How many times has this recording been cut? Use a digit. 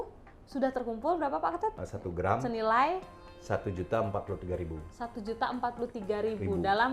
1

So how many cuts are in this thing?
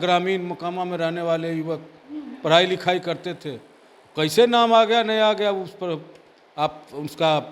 0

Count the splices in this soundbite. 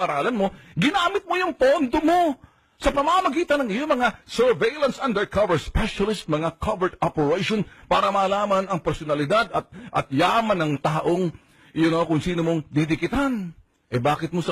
1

